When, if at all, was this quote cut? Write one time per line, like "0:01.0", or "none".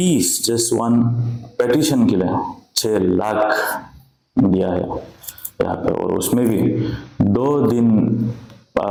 none